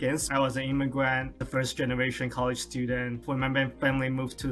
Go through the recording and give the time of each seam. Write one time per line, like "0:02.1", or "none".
0:03.2